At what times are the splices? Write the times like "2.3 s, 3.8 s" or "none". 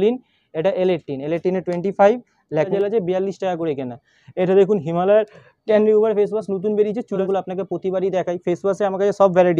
2.7 s, 7.2 s